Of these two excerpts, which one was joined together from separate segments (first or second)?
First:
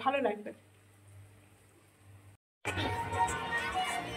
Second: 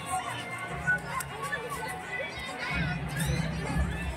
first